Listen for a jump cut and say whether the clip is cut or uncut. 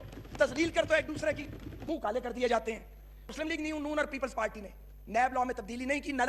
cut